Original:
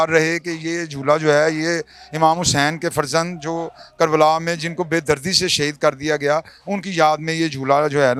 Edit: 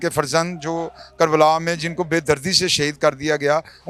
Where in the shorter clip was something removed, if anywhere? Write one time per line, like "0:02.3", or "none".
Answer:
none